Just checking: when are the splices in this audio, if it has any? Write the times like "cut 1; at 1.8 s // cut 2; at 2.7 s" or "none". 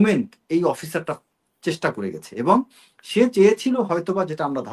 none